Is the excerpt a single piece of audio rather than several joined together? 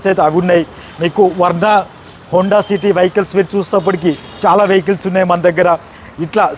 yes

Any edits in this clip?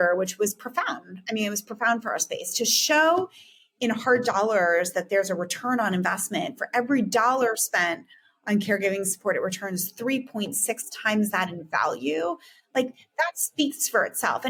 no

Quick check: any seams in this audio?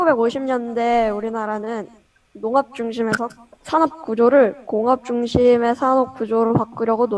no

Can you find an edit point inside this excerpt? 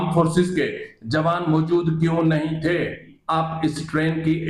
yes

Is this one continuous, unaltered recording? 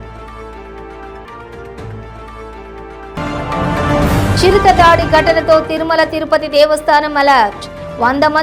no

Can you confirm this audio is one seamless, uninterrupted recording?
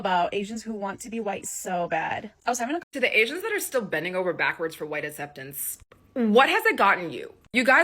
no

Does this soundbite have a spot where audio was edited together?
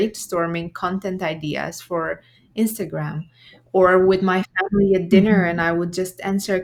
no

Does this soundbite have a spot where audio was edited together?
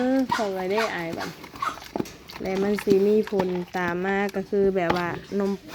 no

